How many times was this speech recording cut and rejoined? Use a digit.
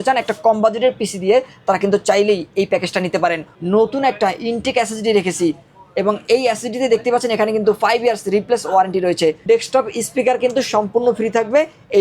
2